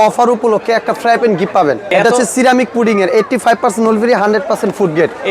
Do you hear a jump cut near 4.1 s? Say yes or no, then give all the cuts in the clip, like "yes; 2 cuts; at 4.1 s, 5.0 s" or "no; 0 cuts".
no; 1 cut; at 1.9 s